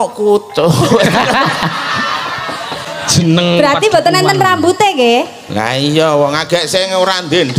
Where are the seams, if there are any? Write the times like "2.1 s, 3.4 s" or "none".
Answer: 2.8 s